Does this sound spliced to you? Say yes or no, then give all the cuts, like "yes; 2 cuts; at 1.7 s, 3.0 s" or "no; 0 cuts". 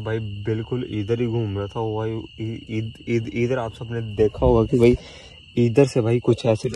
no; 0 cuts